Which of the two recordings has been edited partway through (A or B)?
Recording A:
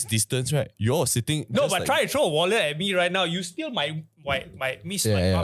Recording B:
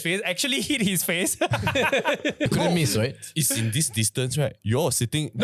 B